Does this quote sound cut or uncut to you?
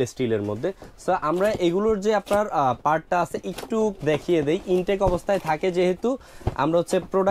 uncut